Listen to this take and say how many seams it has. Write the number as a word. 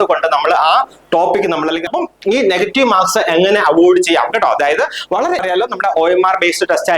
two